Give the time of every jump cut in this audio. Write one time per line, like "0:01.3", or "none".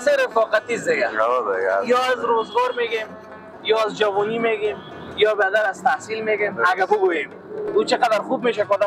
none